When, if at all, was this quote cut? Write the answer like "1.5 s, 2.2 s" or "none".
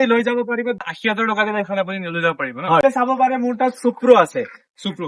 0.8 s, 2.8 s